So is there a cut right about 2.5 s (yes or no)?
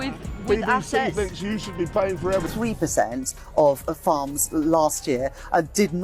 yes